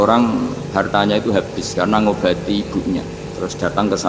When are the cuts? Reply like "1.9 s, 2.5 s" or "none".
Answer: 0.9 s, 3.2 s